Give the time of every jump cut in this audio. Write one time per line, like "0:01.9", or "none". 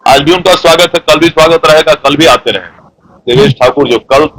0:03.0